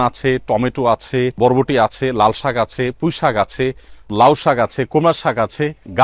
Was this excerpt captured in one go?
no; 2 cuts; at 1.4 s, 4.1 s

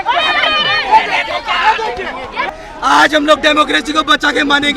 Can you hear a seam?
yes; 1 cut; at 2.5 s

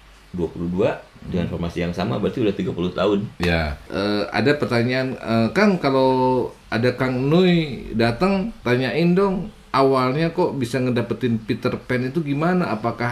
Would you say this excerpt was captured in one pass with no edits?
no; 2 cuts; at 3.8 s, 8.5 s

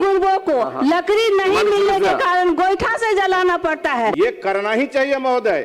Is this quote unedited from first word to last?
no; 1 cut; at 4.1 s

